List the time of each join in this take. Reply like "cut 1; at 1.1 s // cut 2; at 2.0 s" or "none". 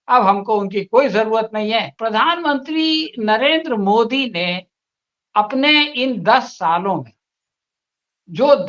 cut 1; at 1.9 s